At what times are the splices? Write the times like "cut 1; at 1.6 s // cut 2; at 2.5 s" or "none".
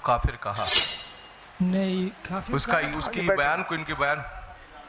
none